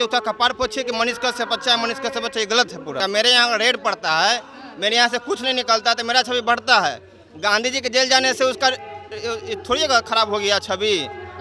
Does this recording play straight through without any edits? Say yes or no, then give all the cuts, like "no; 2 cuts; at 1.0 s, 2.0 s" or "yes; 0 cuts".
no; 1 cut; at 3.0 s